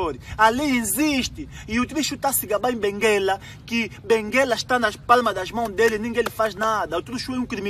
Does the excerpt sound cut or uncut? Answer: uncut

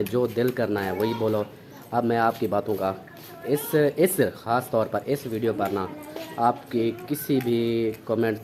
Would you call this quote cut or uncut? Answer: uncut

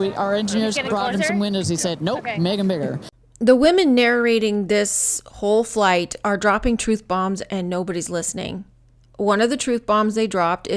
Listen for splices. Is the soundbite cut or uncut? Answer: uncut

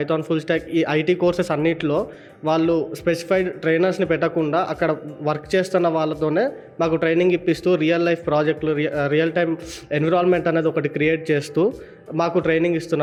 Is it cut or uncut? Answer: uncut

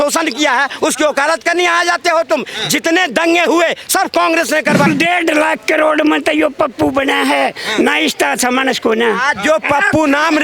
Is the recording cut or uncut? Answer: cut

